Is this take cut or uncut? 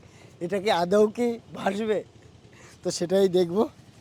uncut